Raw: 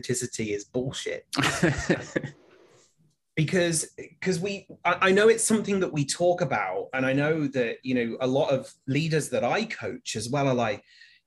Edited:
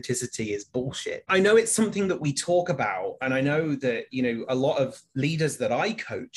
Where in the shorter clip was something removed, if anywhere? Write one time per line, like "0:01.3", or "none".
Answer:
0:01.3